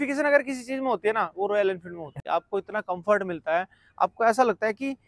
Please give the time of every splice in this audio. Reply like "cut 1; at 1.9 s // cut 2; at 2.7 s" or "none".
cut 1; at 2.2 s